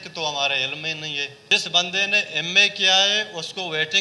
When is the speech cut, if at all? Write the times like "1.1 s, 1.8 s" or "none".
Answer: 1.3 s